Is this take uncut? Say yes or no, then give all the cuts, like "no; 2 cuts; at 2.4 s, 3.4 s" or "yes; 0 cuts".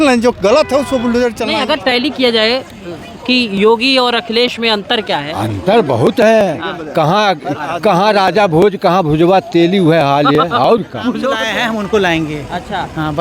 no; 2 cuts; at 1.4 s, 11.4 s